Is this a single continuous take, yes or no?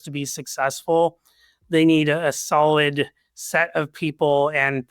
yes